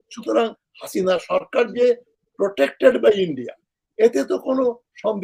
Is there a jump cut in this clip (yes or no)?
no